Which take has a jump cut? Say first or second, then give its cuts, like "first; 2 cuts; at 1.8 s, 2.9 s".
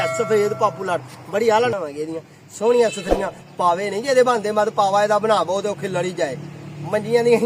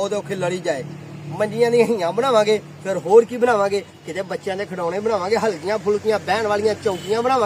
first; 1 cut; at 1.7 s